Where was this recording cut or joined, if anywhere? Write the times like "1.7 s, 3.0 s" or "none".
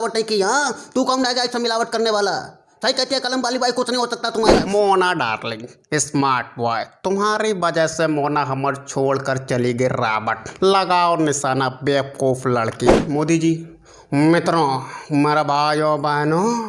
4.6 s, 13.0 s